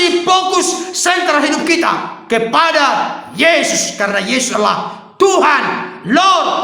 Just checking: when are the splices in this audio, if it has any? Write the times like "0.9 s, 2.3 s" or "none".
none